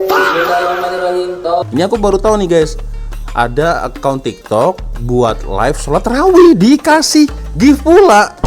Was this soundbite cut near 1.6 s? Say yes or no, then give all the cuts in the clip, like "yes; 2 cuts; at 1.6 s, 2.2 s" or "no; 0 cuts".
yes; 1 cut; at 1.6 s